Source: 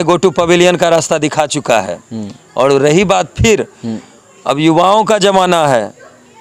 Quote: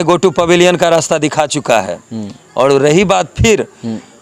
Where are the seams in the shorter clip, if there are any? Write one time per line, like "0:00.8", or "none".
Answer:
none